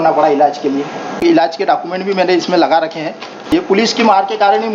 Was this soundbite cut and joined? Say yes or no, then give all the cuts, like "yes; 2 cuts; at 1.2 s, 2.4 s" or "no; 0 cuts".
yes; 2 cuts; at 1.2 s, 3.5 s